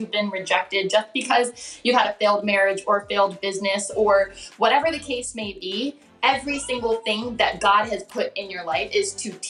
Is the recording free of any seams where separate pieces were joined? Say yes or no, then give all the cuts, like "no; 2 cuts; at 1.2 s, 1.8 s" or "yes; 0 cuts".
yes; 0 cuts